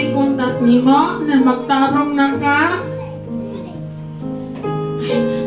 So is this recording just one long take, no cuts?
yes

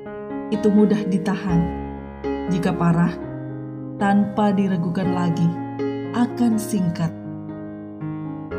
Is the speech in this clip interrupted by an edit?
yes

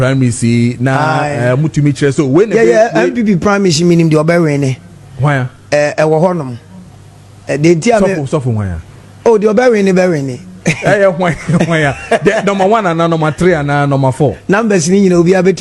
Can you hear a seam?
no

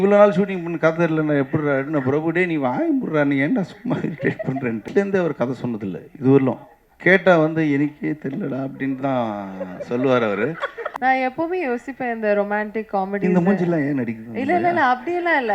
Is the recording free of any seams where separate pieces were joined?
no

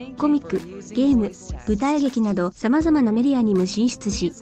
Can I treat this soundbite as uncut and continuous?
yes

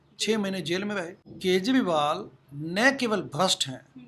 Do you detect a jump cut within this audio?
yes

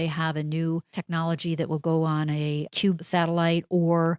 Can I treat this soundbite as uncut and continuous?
no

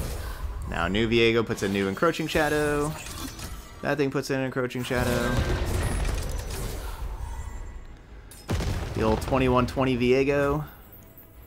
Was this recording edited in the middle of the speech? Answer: no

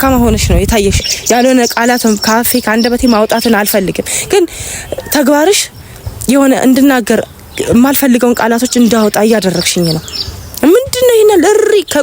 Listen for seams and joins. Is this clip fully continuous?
no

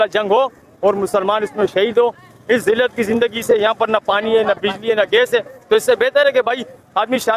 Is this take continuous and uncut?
yes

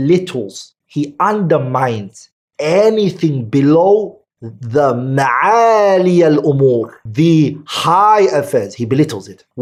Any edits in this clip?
no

